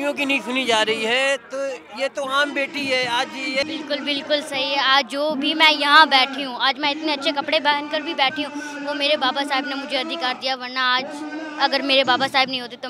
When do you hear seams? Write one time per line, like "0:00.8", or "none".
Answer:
0:03.6

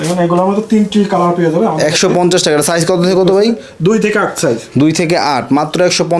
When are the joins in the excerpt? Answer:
none

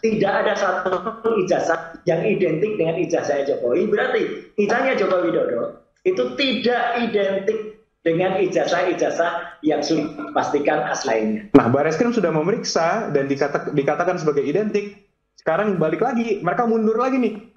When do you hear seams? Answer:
0:11.4

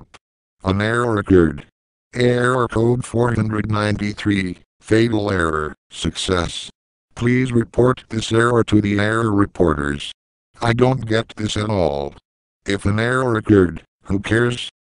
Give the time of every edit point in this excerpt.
0:05.7

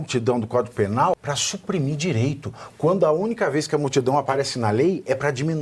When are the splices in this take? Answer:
0:01.1

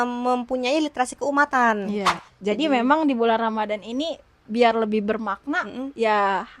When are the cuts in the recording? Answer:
0:02.2

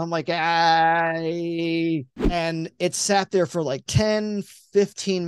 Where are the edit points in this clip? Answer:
0:02.2

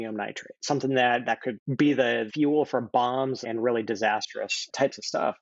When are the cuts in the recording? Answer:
0:02.3
0:03.4

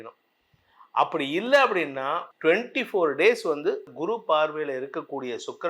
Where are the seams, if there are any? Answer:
0:02.3
0:03.9

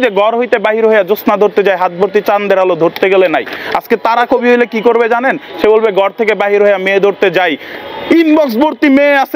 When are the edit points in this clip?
none

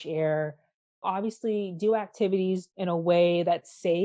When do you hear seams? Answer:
0:01.0
0:02.7

